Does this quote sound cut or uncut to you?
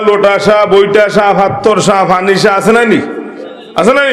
uncut